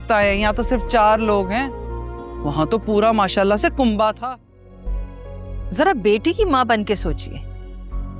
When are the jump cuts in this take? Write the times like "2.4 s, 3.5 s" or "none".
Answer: 4.2 s

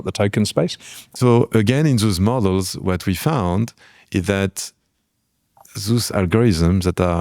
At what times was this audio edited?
1.2 s

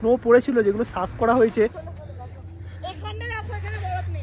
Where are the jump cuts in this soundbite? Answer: 1.9 s

